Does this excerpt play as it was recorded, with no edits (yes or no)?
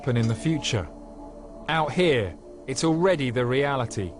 no